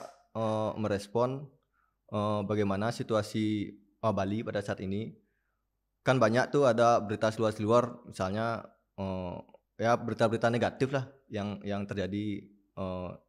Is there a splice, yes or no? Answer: no